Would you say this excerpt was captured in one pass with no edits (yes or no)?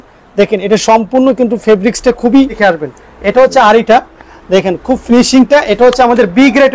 no